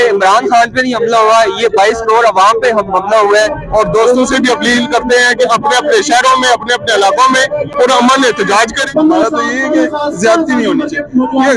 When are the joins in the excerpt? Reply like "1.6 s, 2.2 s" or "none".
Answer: 3.6 s, 8.8 s